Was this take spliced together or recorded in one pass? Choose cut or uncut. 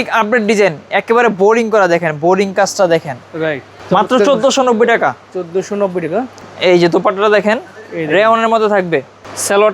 uncut